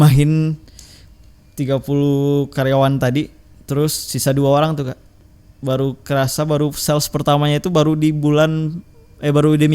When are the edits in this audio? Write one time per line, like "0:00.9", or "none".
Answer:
0:05.1